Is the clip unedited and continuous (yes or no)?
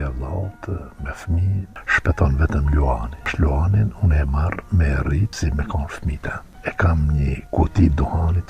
no